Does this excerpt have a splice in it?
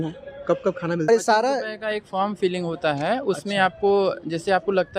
yes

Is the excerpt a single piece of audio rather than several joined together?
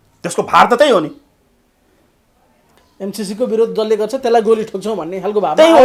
yes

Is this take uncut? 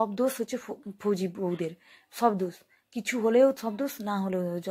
yes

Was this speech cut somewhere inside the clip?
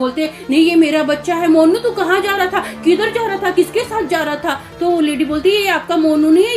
no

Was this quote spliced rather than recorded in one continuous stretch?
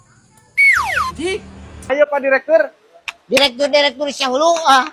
yes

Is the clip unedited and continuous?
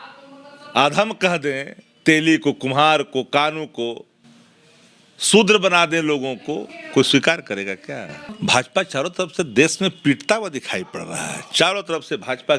no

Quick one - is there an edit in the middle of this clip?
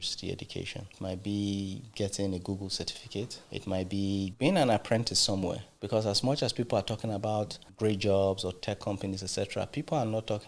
yes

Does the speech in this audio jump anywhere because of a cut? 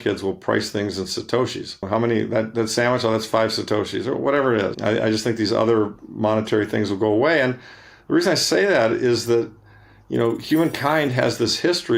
yes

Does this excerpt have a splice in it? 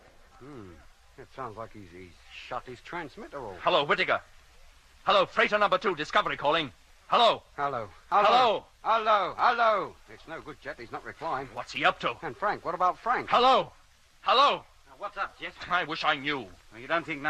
no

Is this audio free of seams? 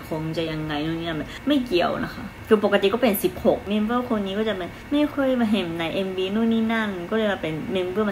no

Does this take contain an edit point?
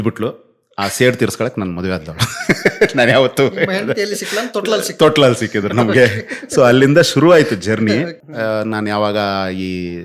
yes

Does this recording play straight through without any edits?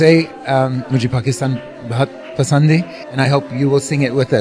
no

